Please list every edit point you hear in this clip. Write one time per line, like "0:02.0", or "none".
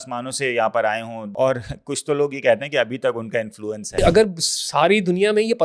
0:01.3
0:04.0